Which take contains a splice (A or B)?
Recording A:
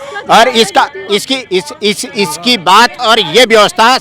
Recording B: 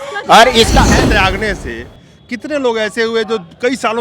B